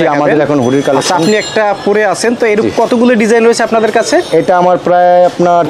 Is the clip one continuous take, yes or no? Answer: yes